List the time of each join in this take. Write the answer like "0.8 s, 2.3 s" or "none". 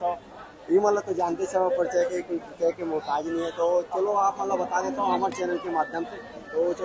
none